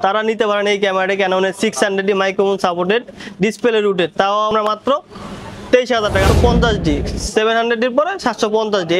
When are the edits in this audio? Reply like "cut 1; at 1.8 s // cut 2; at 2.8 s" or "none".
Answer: cut 1; at 4.5 s // cut 2; at 6.3 s